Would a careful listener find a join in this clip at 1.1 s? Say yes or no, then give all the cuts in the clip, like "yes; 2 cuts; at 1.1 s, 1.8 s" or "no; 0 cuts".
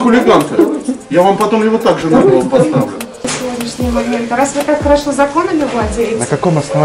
no; 1 cut; at 3.2 s